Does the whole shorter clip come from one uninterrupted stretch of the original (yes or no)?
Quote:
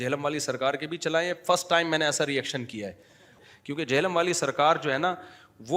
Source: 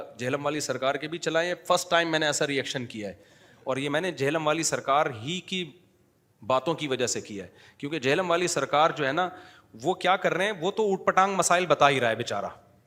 no